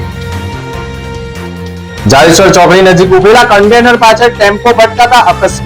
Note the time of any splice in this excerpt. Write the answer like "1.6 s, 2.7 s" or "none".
1.7 s